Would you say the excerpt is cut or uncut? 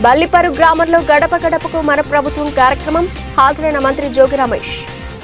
uncut